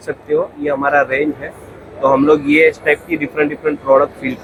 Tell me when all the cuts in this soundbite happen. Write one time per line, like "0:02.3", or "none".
none

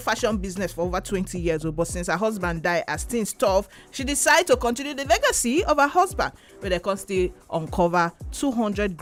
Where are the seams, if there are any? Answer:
none

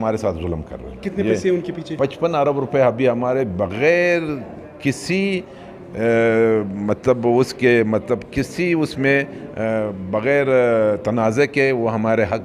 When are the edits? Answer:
none

